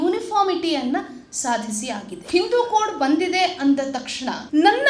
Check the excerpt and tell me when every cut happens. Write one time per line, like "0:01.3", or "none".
0:02.1